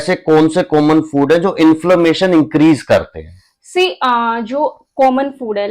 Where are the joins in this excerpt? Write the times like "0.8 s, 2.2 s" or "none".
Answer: none

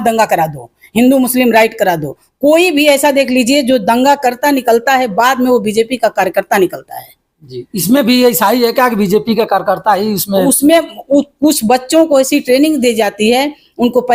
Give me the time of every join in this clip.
none

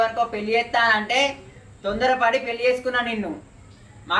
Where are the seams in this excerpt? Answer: none

